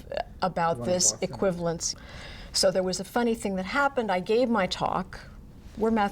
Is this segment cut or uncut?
cut